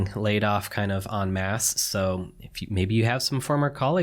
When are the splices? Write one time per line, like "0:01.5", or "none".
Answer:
none